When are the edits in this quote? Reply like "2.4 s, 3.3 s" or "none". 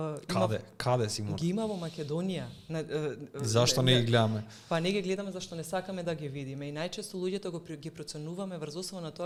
none